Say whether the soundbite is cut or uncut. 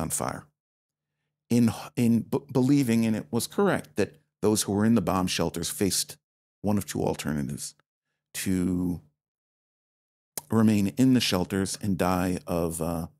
uncut